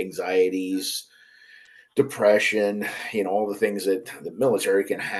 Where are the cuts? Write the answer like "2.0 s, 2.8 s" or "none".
none